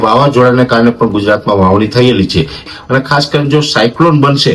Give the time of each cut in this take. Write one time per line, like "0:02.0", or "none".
0:02.7